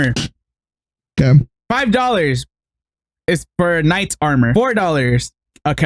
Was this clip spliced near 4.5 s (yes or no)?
yes